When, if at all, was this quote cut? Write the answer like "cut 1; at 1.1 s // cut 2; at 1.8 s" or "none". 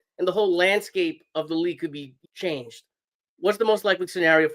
cut 1; at 2.1 s